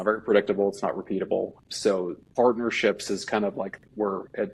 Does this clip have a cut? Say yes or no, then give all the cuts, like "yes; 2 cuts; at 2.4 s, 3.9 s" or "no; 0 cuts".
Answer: yes; 1 cut; at 1.6 s